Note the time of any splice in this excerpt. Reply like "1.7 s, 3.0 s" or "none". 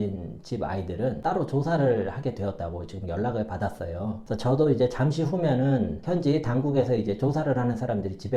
none